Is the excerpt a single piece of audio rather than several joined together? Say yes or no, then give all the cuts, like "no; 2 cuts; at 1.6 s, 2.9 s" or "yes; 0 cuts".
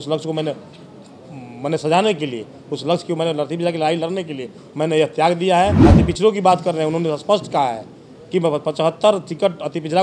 no; 1 cut; at 5.8 s